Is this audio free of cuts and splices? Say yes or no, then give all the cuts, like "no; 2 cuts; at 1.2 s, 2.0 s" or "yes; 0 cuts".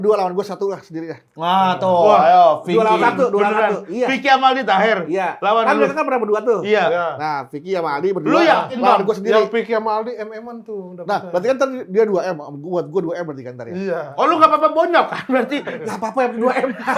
yes; 0 cuts